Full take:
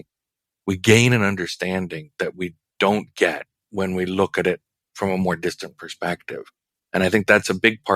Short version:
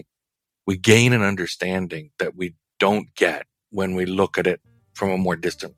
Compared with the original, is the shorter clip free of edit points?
yes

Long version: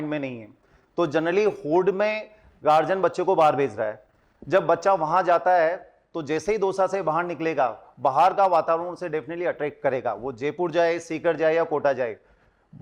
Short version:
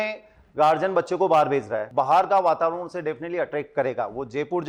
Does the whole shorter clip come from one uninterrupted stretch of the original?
no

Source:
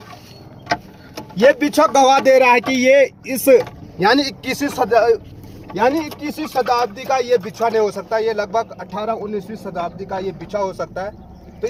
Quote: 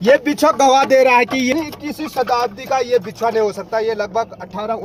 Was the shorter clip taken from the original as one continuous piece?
no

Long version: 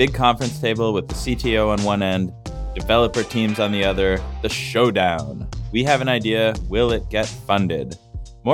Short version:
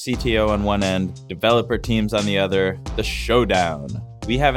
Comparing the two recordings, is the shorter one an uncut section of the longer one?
no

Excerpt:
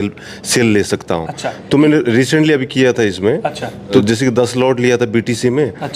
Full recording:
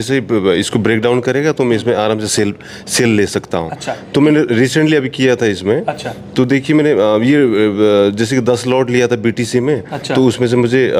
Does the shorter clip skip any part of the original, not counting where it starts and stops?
yes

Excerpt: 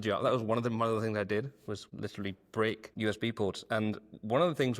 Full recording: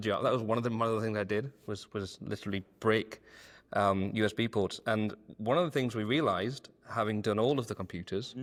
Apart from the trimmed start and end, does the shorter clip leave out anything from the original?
yes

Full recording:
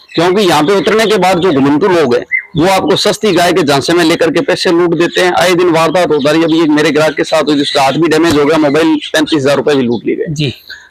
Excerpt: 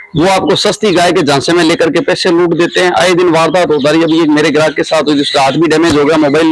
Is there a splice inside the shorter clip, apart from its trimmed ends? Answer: no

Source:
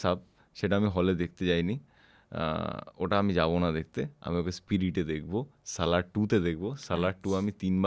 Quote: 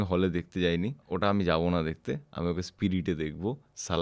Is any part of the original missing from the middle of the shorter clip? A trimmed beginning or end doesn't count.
yes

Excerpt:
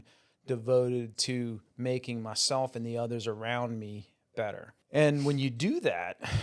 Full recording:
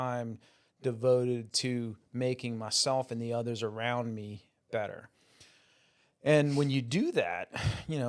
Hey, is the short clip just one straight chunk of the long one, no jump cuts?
no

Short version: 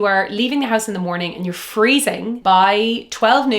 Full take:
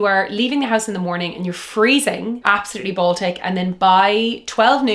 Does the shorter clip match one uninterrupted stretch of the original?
no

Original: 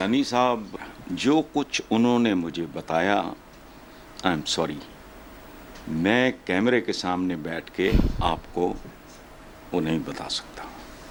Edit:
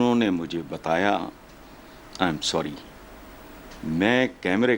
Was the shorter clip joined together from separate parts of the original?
no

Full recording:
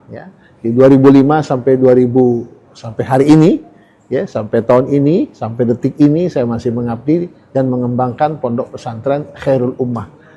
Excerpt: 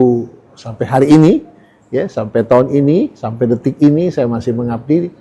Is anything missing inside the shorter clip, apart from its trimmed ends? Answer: no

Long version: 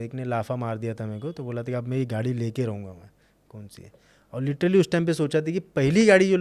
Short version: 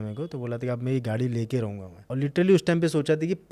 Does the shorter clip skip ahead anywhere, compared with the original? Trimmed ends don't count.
yes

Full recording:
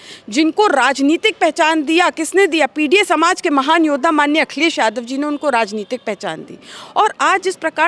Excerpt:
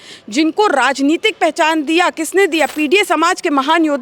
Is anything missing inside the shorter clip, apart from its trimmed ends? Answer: no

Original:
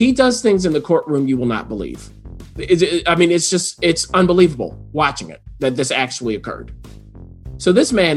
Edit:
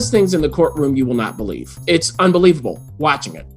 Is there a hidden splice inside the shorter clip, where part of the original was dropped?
yes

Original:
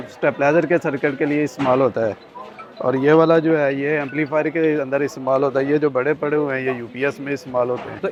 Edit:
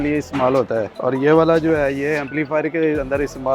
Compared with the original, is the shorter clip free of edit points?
no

